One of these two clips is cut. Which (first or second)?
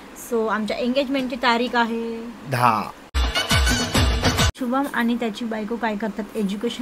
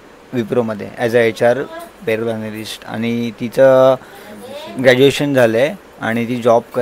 first